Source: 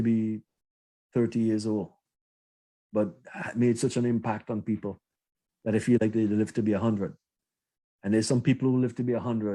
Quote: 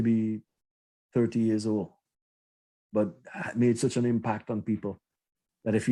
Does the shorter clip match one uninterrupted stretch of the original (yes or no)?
yes